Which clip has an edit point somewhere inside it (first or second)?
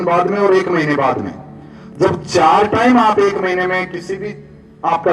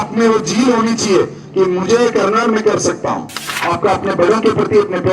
second